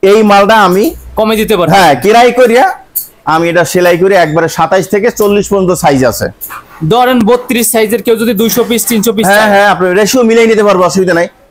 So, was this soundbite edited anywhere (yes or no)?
no